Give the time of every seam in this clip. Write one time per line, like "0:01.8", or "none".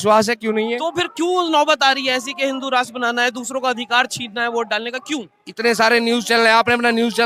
none